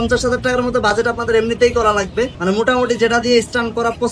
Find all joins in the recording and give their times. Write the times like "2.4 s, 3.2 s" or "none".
2.4 s